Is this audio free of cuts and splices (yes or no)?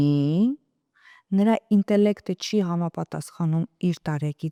yes